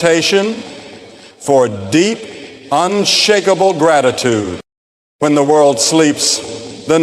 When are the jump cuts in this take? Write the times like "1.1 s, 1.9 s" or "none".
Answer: none

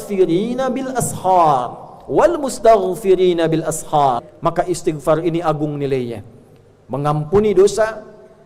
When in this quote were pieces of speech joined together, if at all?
4.3 s

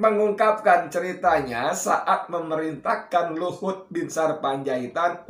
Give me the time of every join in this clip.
none

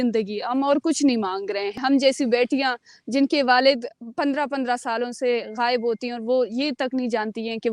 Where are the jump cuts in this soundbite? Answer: 1.8 s

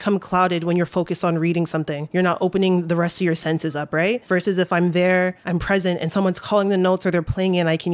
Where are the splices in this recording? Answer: 2.0 s, 4.2 s, 5.4 s

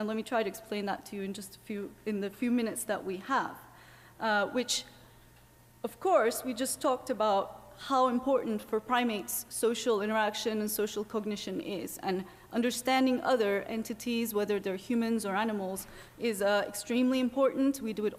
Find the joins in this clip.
none

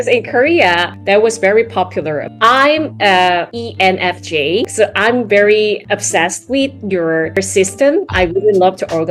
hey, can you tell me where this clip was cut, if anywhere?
2.3 s, 3.6 s, 4.7 s

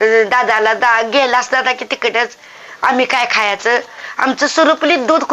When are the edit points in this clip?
none

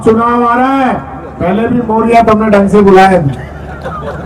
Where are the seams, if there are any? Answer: none

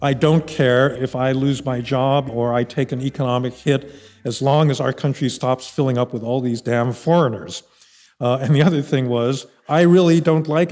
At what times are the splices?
0.9 s, 2.3 s

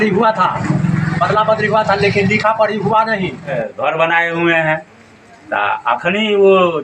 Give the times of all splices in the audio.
3.6 s

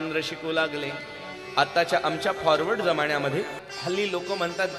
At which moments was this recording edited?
3.6 s

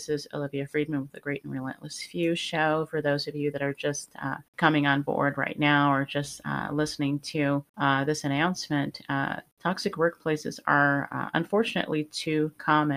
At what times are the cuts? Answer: 4.5 s, 7.7 s, 9.5 s

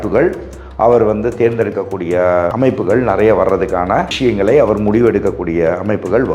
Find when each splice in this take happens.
2.5 s, 4.1 s

